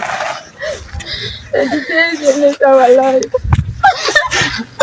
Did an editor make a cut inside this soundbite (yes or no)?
no